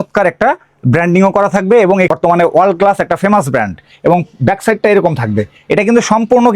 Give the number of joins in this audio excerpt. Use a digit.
1